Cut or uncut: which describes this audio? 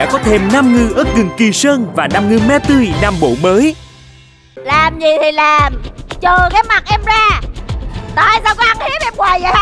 cut